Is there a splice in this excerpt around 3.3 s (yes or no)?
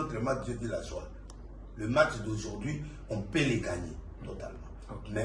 no